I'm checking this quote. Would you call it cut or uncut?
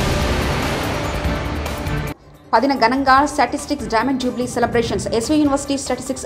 uncut